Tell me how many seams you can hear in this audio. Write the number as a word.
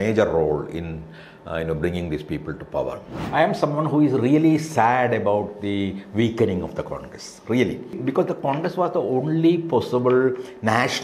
two